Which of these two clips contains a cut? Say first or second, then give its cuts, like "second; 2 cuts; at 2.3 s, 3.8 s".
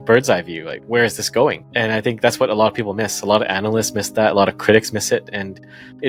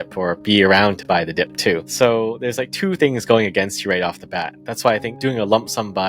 second; 2 cuts; at 1.9 s, 5.1 s